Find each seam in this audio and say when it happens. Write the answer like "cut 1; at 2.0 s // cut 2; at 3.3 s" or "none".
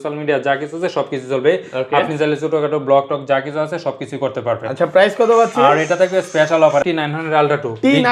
cut 1; at 6.8 s

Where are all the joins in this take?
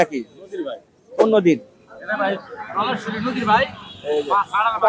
none

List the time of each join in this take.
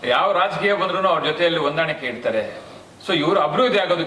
none

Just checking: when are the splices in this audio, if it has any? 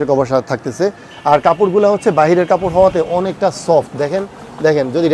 none

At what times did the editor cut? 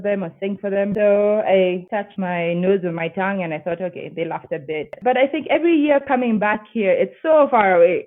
cut 1; at 0.9 s // cut 2; at 2.1 s // cut 3; at 4.9 s

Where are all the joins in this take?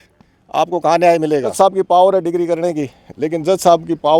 cut 1; at 1.5 s

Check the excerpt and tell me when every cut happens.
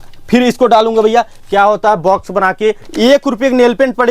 cut 1; at 2.9 s

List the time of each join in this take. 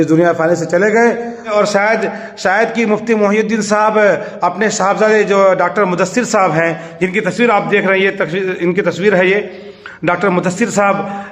cut 1; at 1.5 s

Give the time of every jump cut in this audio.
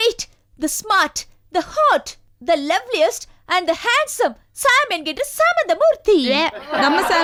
none

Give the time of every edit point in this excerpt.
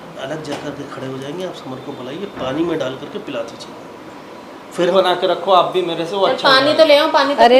cut 1; at 4.7 s

